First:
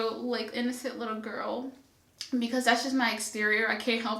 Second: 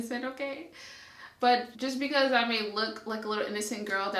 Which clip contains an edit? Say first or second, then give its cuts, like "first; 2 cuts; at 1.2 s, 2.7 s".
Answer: second; 1 cut; at 1.7 s